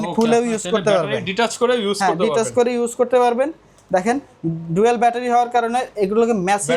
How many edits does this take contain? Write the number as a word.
zero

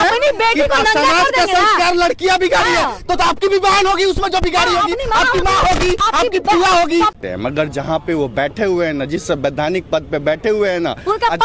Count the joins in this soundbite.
one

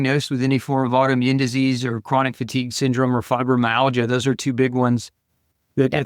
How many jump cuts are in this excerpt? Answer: zero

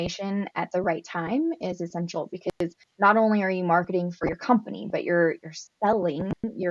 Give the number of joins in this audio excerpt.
zero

